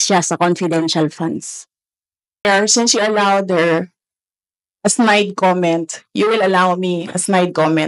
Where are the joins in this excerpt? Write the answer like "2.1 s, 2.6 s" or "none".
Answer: 2.4 s